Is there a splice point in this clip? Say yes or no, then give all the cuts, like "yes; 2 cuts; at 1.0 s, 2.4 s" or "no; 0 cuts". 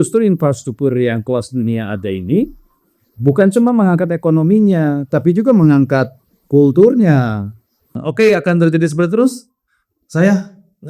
yes; 1 cut; at 8.0 s